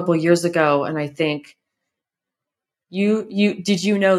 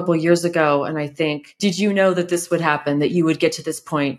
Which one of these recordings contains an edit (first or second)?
second